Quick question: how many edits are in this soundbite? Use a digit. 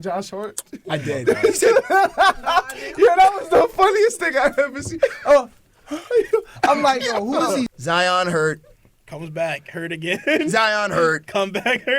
1